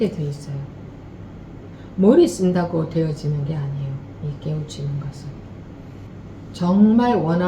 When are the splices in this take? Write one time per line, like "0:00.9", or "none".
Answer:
0:06.1

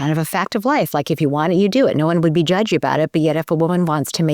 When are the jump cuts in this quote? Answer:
none

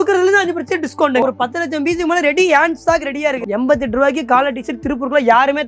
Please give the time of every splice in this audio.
0:01.2
0:03.4

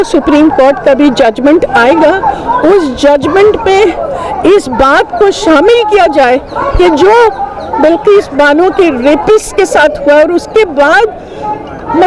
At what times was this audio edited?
none

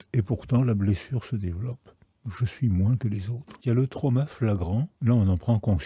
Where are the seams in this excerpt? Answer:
0:03.5
0:04.9

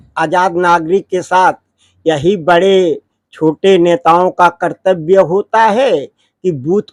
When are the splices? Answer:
none

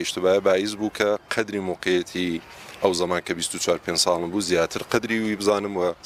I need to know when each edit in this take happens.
none

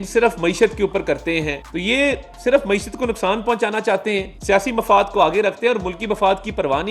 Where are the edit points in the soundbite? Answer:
0:01.6
0:04.3

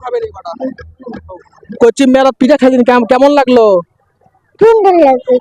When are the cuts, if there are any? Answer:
0:01.6

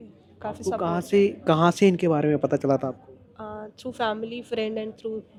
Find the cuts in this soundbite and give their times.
none

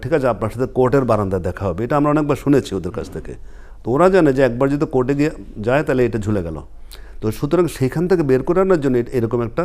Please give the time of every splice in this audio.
none

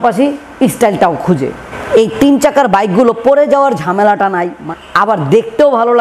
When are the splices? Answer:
0:01.6
0:04.6

